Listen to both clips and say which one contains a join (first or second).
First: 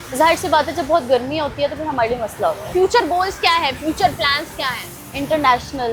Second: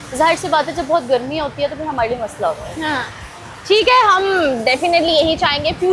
first